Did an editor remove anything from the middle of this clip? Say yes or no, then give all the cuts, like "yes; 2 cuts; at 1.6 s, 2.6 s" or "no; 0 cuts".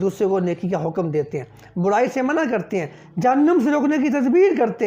no; 0 cuts